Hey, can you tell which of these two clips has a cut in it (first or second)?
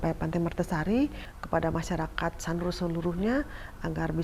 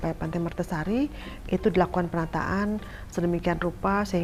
first